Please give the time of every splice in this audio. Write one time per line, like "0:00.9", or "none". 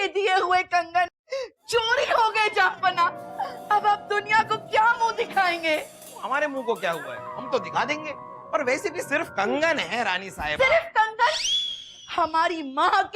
0:01.1